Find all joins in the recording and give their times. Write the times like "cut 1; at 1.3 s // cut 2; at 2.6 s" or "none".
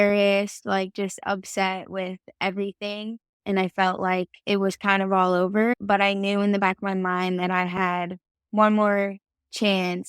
cut 1; at 4.4 s // cut 2; at 5.7 s